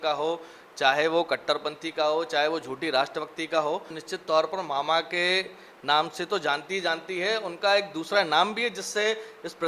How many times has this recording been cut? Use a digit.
1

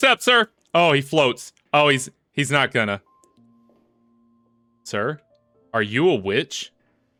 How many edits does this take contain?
0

